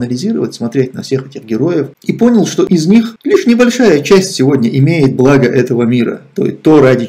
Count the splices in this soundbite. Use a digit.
1